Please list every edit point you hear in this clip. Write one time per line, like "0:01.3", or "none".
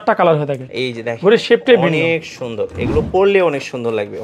none

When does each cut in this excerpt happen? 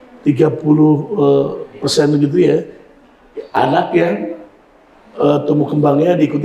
none

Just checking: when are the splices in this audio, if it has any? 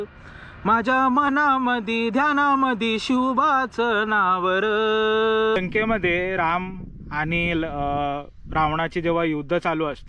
0:05.6

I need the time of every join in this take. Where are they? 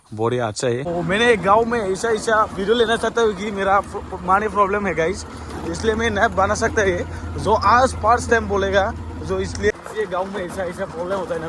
0:00.9
0:09.7

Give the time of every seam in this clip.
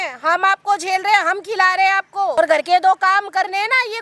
0:02.3

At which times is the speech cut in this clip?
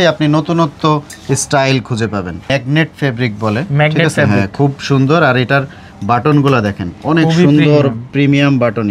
0:02.5

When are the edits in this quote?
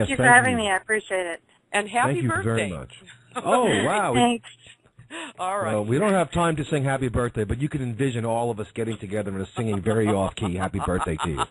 0:03.8

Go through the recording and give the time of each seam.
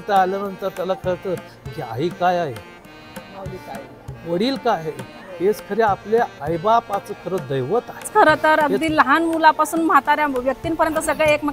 0:08.1

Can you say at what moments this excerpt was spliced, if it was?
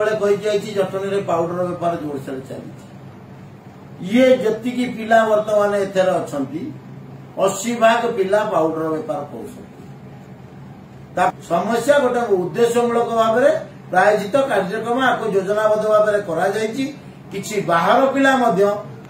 0:11.3

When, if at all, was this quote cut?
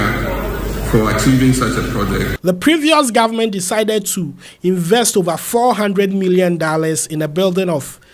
0:02.3

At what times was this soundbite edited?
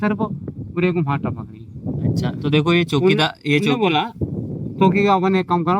none

